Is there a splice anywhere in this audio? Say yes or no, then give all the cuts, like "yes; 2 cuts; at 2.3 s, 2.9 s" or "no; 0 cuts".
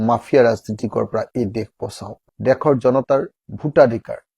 yes; 1 cut; at 2.2 s